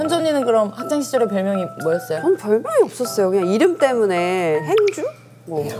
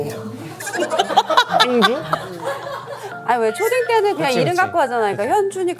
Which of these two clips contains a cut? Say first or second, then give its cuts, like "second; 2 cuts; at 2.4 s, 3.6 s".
second; 1 cut; at 3.1 s